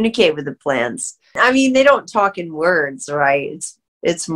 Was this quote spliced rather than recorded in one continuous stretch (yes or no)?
yes